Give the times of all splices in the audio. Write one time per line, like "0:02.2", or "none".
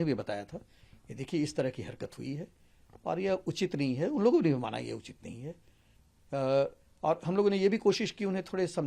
none